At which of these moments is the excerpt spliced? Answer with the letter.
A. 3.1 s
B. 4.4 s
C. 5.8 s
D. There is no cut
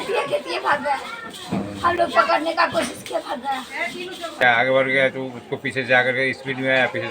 B